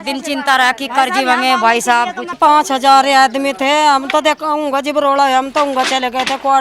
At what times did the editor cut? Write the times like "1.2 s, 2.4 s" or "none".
2.4 s